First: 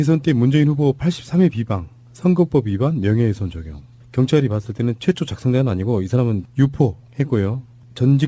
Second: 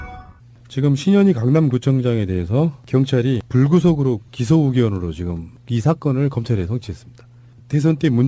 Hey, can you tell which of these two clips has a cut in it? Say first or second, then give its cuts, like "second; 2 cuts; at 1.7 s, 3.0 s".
second; 1 cut; at 4.8 s